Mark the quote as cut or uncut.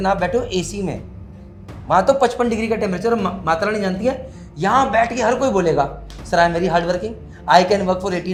uncut